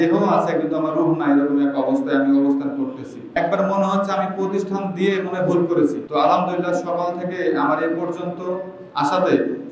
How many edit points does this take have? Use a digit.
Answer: 2